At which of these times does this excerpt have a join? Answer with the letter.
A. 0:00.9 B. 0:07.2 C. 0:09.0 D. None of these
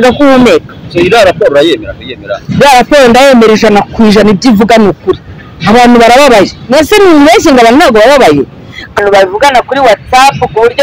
C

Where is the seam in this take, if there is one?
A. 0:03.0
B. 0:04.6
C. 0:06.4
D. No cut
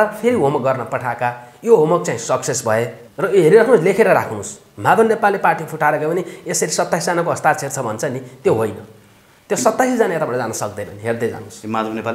A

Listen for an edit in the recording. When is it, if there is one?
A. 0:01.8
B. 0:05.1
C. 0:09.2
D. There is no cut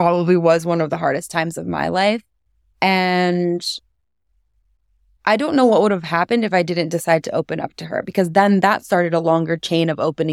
B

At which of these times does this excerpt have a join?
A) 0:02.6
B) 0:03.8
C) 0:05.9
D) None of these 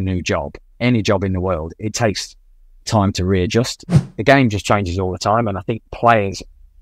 B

